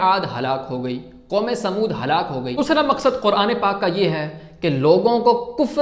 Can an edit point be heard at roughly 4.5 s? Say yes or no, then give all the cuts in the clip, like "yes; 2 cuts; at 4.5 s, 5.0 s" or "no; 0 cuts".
no; 1 cut; at 2.5 s